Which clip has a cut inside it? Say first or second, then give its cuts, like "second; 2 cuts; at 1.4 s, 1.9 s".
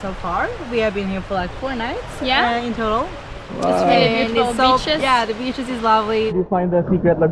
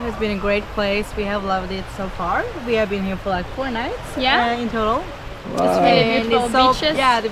first; 1 cut; at 6.3 s